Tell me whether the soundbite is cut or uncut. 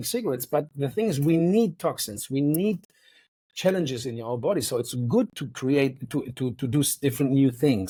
uncut